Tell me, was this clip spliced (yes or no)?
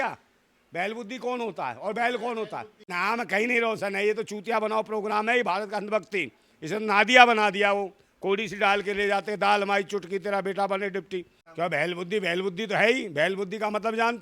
yes